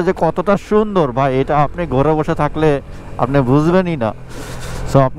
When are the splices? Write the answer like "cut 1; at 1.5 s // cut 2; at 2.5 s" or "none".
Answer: none